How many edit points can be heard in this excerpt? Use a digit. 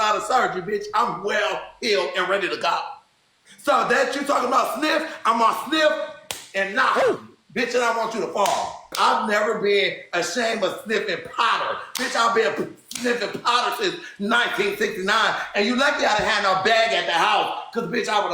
1